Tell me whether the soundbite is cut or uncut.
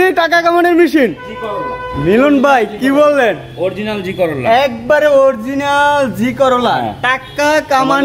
uncut